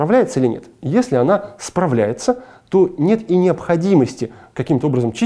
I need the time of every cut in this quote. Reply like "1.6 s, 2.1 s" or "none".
none